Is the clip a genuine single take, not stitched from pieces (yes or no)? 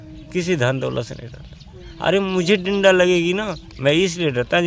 yes